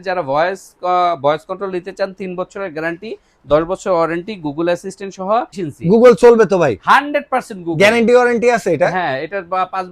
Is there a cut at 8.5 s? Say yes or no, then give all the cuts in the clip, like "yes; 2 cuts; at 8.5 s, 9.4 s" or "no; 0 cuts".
no; 1 cut; at 5.6 s